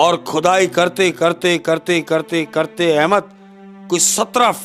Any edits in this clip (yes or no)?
no